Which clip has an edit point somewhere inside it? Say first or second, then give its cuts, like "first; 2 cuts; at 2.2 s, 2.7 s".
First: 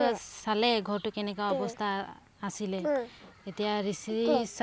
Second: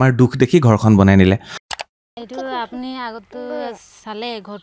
second; 1 cut; at 1.7 s